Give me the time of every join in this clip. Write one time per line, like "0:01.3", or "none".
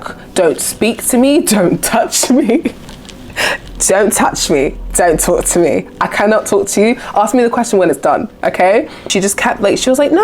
0:09.1